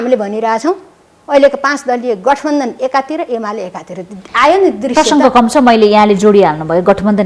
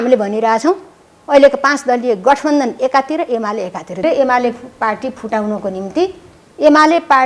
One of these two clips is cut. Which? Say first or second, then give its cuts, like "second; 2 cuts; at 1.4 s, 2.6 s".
second; 1 cut; at 4.0 s